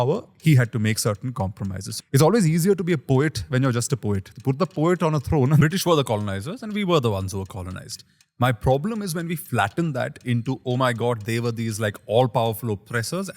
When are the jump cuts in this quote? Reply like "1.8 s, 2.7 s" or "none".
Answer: 1.9 s, 5.6 s